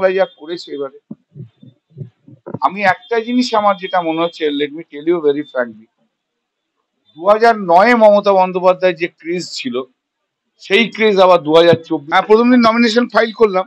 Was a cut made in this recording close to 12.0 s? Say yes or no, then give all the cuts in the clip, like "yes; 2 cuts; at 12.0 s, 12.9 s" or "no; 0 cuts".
yes; 1 cut; at 12.0 s